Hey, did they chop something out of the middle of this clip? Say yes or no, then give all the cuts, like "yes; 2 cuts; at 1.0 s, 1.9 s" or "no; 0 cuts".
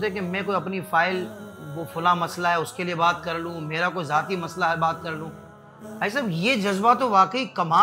no; 0 cuts